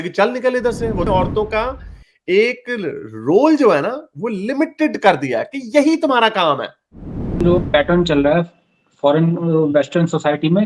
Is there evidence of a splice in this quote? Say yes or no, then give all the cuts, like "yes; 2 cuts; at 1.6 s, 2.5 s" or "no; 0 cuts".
yes; 2 cuts; at 1.1 s, 7.4 s